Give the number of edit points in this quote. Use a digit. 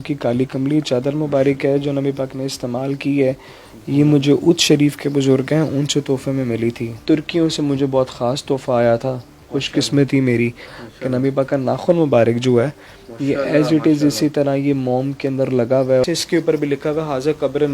2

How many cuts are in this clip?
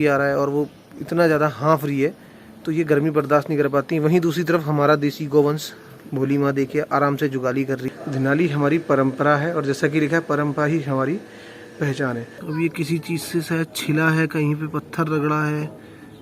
2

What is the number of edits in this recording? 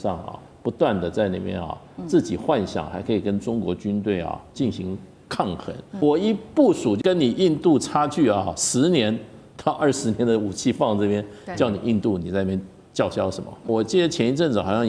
3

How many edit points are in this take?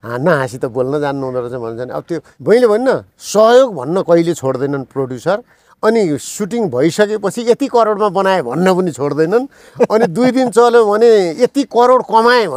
1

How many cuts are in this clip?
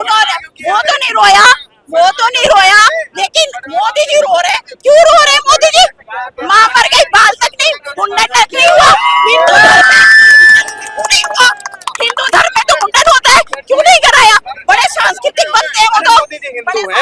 0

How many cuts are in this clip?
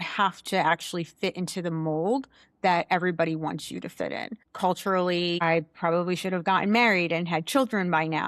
2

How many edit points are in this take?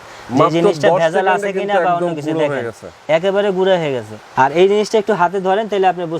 1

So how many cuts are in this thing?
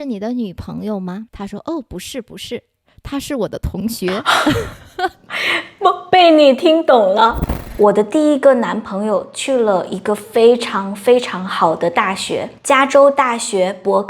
3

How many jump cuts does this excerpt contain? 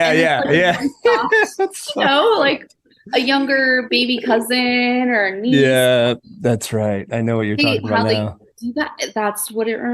0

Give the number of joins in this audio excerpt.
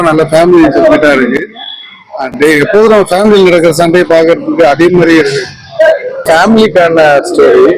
1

